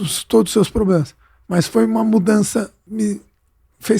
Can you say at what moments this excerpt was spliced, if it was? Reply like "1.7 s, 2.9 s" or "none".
2.9 s